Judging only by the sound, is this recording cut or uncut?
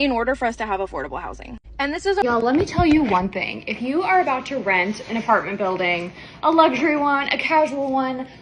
cut